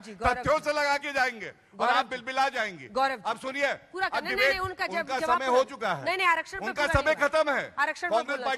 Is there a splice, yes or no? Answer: no